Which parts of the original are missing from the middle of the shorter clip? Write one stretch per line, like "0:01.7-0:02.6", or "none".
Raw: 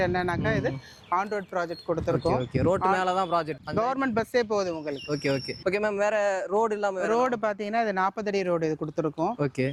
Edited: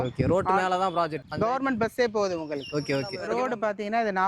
0:05.5-0:07.0